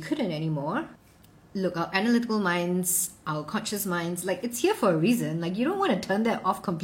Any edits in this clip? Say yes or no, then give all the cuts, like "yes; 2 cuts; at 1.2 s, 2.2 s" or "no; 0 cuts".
yes; 1 cut; at 1.0 s